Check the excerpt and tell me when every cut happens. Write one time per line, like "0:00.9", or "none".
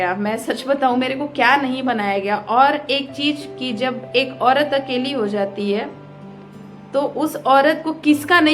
none